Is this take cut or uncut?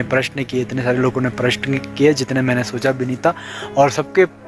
uncut